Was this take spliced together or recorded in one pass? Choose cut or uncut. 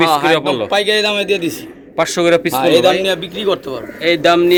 uncut